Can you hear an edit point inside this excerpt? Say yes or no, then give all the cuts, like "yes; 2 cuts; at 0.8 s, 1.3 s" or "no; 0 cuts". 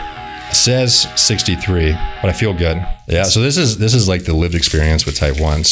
yes; 1 cut; at 2.9 s